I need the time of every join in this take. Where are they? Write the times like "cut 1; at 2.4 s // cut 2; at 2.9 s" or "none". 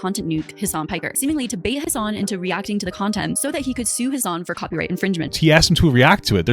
cut 1; at 1.8 s // cut 2; at 5.3 s